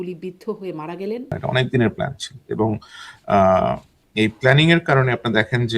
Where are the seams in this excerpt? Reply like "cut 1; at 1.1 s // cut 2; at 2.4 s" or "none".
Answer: cut 1; at 1.4 s